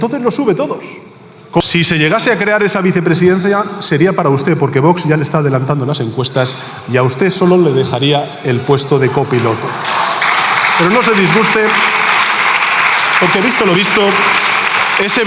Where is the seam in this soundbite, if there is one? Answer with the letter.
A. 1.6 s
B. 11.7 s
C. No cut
A